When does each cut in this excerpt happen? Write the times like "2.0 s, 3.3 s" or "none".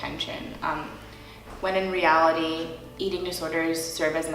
2.8 s

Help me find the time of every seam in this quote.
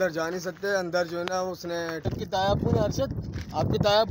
2.1 s

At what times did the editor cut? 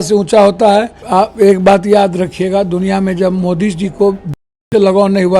1.0 s

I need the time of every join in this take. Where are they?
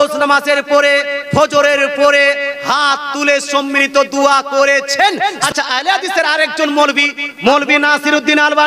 5.4 s, 7.2 s

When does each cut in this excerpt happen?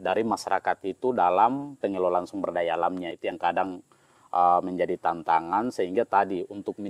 none

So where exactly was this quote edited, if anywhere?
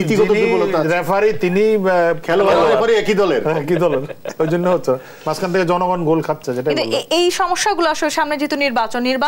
none

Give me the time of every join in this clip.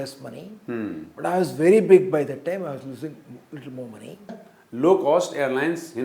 4.4 s

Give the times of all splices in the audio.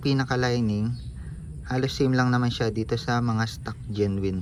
none

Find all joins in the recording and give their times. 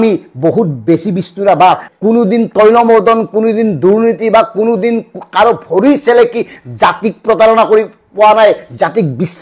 1.9 s

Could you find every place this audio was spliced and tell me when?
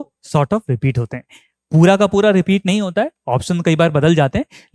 none

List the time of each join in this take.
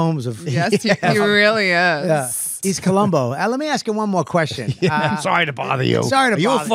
2.5 s

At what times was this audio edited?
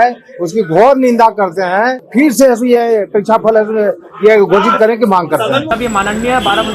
2.0 s, 5.7 s

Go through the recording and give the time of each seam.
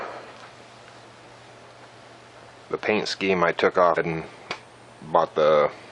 none

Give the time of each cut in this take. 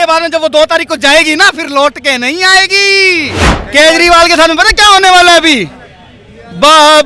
3.5 s

